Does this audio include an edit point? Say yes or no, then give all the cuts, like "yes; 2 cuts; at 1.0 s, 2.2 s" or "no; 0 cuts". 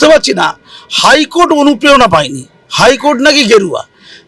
no; 0 cuts